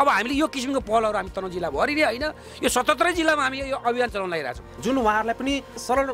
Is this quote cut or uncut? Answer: uncut